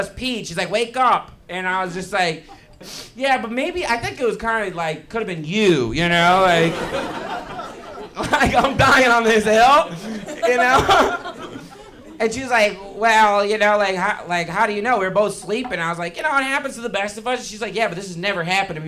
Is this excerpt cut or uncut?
cut